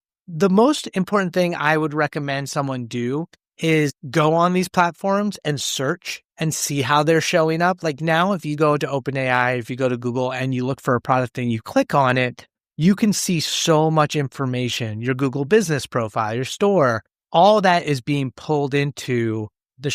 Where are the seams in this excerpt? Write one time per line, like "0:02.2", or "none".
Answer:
none